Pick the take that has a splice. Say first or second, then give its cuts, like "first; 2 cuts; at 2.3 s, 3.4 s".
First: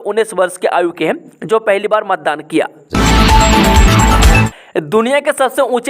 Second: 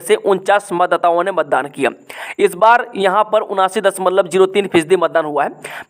first; 2 cuts; at 2.8 s, 4.6 s